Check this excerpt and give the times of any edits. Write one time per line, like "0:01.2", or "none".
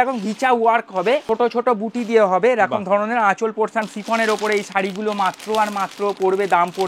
0:01.2
0:03.8